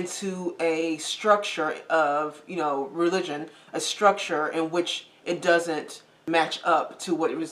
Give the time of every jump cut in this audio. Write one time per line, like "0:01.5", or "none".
0:06.2